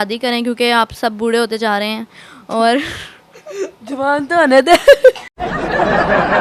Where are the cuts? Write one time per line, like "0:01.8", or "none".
none